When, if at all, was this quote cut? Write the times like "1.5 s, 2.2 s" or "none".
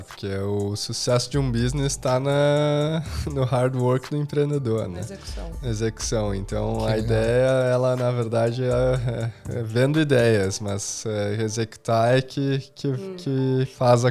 none